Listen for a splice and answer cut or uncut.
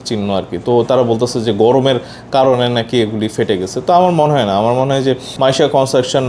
cut